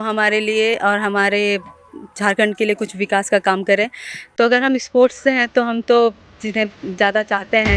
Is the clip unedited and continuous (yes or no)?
yes